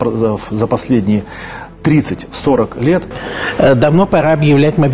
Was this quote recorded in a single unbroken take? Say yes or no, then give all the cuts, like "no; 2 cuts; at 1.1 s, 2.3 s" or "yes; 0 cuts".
no; 1 cut; at 3.3 s